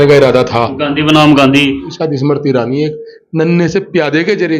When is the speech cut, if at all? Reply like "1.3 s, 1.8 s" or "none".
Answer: 1.9 s